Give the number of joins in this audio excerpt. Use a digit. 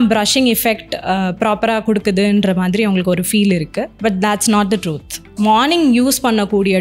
2